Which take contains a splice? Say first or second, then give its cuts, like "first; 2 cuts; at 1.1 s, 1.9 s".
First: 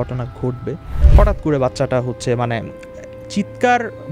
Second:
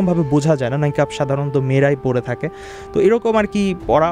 first; 1 cut; at 0.9 s